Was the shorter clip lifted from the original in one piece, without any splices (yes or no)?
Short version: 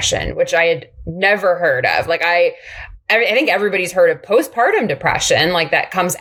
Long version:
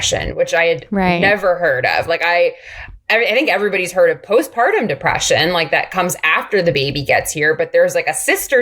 yes